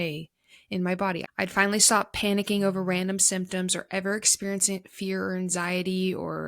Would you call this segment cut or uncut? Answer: cut